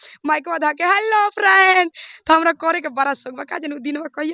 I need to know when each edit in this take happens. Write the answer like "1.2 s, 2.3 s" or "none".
none